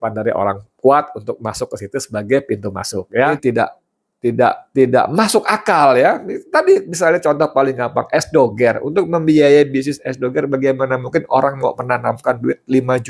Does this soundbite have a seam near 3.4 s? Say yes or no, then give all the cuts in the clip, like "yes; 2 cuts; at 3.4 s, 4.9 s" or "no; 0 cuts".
yes; 1 cut; at 3.4 s